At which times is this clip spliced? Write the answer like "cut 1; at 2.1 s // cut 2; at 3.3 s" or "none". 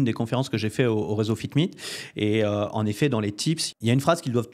cut 1; at 3.6 s